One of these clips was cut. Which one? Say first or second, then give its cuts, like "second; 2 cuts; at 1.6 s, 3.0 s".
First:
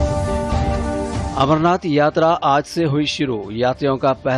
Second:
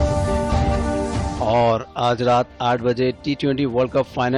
first; 1 cut; at 1.3 s